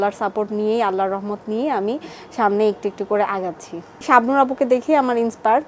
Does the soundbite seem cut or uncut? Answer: cut